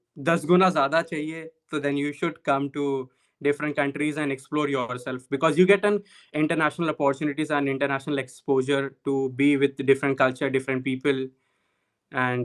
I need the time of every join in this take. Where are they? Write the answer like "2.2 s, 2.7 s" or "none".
none